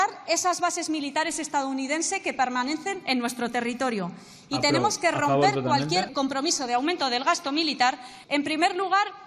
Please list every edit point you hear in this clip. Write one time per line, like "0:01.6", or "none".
0:06.1
0:08.1